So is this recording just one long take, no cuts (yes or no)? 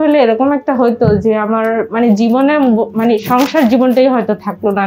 yes